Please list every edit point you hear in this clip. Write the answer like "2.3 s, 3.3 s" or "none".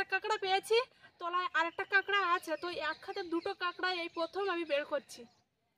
none